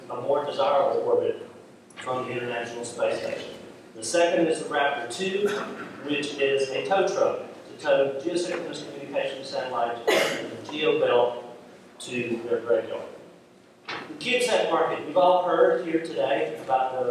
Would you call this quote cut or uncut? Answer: cut